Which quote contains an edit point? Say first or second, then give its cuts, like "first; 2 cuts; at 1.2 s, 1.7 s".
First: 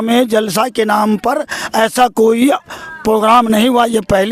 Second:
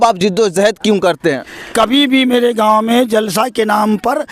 second; 1 cut; at 1.7 s